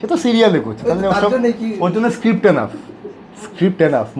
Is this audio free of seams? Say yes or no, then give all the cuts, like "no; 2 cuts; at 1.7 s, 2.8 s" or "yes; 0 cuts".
yes; 0 cuts